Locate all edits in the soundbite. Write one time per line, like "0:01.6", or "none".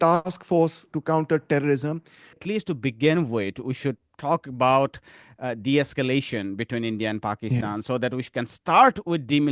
0:02.3